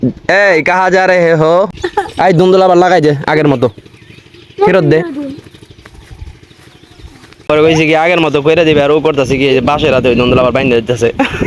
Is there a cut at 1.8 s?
yes; 2 cuts; at 1.8 s, 7.5 s

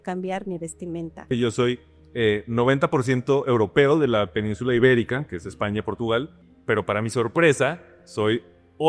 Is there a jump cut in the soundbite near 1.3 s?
yes; 2 cuts; at 1.3 s, 6.5 s

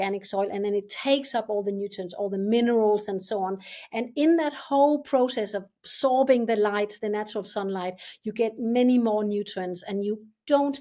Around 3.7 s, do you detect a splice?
no; 0 cuts

